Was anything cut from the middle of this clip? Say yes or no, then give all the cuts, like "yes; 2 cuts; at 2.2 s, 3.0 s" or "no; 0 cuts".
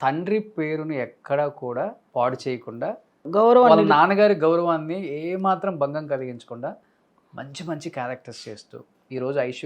yes; 2 cuts; at 2.0 s, 3.2 s